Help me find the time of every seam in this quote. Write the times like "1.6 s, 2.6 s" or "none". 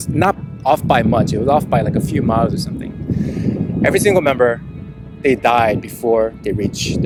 none